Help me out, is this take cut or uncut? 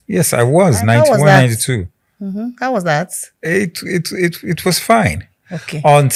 uncut